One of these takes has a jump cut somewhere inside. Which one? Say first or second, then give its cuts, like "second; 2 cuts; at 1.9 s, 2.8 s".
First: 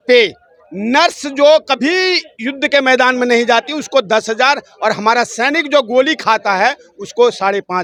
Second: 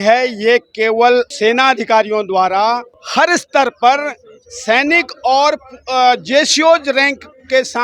second; 2 cuts; at 1.3 s, 3.0 s